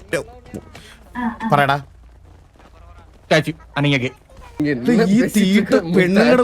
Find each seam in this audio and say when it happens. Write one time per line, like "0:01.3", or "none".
0:04.5